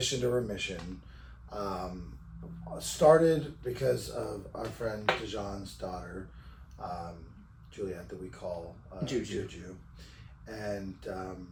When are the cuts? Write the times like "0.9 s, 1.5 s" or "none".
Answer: none